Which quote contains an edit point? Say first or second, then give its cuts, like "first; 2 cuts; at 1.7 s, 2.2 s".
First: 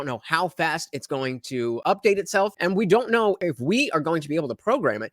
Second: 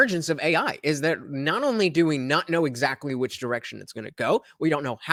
first; 3 cuts; at 1.8 s, 2.5 s, 3.4 s